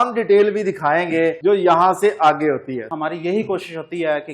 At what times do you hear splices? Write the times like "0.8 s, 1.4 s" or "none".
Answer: 1.4 s, 2.9 s